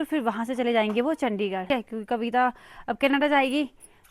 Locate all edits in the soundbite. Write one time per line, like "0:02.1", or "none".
0:01.7